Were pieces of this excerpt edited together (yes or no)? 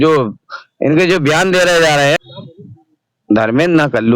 yes